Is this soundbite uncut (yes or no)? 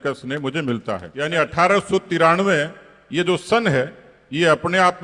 no